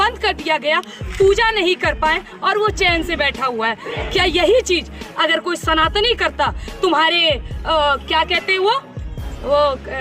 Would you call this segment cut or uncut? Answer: uncut